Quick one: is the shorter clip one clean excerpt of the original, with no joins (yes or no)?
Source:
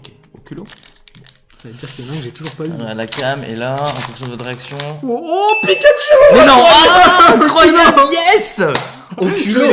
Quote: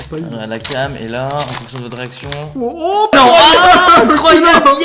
no